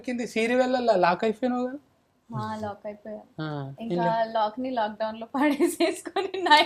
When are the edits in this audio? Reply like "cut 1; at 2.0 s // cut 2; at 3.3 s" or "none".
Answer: none